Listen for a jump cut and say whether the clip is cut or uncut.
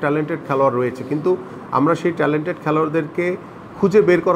uncut